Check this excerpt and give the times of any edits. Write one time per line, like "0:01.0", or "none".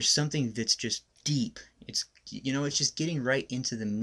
0:01.1